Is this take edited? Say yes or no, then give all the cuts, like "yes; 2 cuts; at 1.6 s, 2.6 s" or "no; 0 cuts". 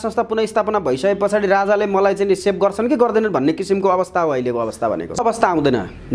yes; 1 cut; at 5.2 s